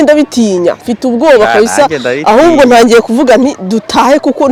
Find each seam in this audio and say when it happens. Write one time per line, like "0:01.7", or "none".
none